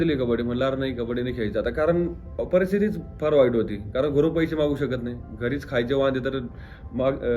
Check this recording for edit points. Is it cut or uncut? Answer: uncut